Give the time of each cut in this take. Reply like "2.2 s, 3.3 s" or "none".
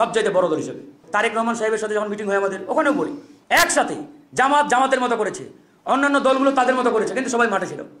1.0 s, 3.3 s